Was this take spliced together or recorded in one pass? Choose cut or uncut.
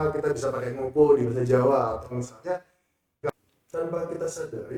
cut